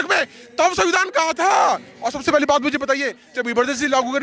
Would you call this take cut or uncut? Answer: uncut